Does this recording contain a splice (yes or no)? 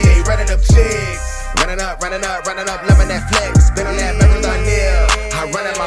no